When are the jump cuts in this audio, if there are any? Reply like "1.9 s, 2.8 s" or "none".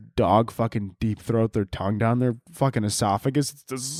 none